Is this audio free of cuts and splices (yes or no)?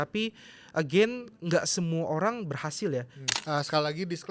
no